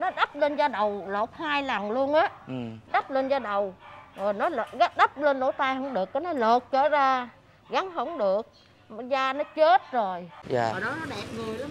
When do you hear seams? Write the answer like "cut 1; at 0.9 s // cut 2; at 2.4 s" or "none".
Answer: cut 1; at 10.3 s

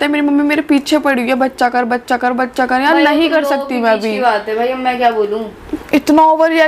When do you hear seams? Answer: cut 1; at 5.7 s

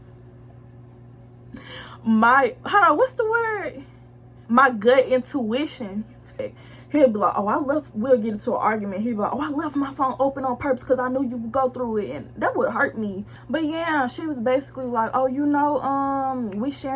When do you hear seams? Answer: cut 1; at 6.3 s // cut 2; at 13.3 s

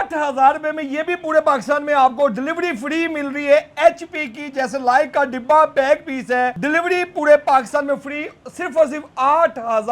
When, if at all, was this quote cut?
cut 1; at 6.6 s

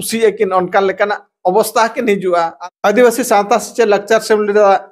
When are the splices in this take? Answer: cut 1; at 2.6 s

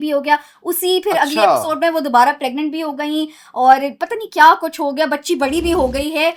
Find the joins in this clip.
none

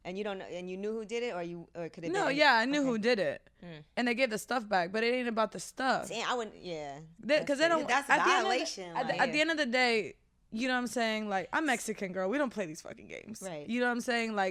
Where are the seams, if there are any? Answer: none

